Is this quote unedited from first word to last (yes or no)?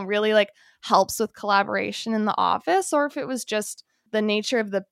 yes